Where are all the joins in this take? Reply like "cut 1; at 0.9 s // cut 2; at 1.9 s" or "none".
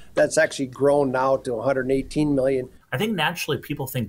cut 1; at 2.8 s